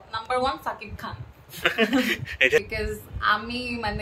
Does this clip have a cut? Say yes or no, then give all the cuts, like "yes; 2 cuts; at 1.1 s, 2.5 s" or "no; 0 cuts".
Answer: yes; 1 cut; at 2.7 s